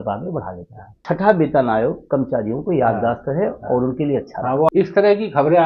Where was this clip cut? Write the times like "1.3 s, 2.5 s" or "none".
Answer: 1.0 s, 4.7 s

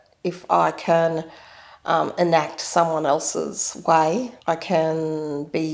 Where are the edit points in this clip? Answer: 4.3 s

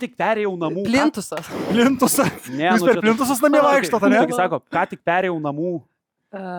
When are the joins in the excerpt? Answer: none

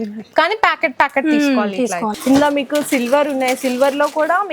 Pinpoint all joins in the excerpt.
2.2 s

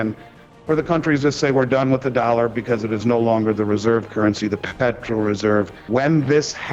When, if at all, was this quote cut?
4.7 s, 5.8 s

